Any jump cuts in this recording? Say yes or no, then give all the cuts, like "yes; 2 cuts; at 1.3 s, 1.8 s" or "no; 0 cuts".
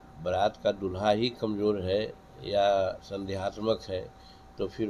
no; 0 cuts